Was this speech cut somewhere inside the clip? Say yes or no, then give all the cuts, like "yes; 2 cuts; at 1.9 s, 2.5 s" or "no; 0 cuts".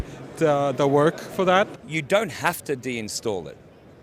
yes; 1 cut; at 1.8 s